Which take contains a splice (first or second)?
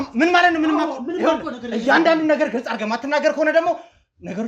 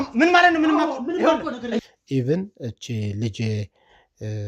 second